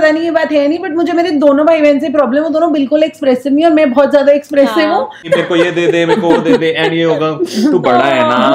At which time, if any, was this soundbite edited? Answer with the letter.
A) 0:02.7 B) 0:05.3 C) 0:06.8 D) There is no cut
B